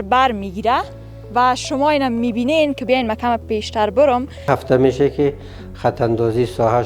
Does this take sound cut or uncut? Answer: cut